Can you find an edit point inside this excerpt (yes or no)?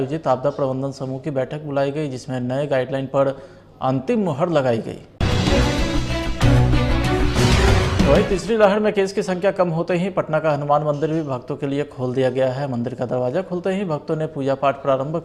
no